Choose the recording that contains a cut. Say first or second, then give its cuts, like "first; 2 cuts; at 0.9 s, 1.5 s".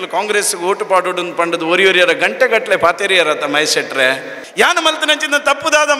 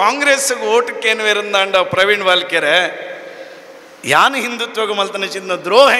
first; 1 cut; at 4.3 s